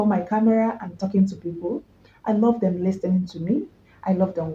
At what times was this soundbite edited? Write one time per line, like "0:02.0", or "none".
none